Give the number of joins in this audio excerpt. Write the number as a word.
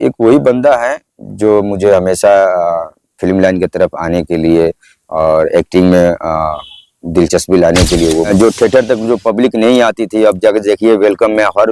one